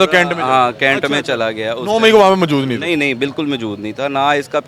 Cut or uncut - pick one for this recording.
uncut